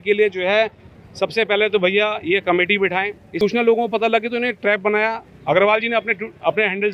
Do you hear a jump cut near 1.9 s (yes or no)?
no